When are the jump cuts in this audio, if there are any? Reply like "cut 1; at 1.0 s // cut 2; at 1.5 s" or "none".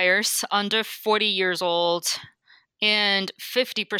none